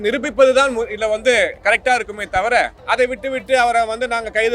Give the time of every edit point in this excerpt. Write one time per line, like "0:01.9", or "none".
0:02.8